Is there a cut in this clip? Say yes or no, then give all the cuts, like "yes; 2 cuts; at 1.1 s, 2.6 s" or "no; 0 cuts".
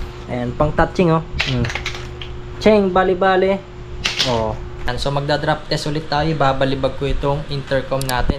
yes; 1 cut; at 4.9 s